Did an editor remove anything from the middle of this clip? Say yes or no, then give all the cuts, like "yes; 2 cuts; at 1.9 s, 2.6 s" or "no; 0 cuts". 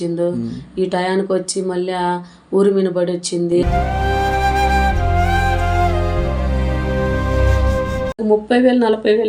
yes; 1 cut; at 8.2 s